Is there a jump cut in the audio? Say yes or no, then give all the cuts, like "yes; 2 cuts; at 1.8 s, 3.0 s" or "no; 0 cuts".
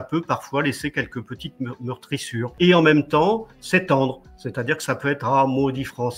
yes; 1 cut; at 2.5 s